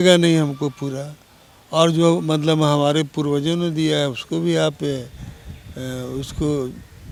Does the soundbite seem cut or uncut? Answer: uncut